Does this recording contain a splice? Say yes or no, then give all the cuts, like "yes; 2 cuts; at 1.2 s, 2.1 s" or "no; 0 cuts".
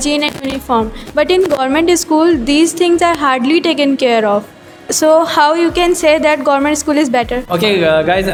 no; 0 cuts